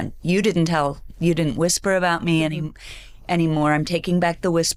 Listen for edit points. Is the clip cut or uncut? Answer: uncut